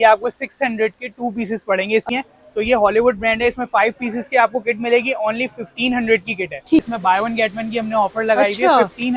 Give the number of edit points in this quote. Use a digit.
2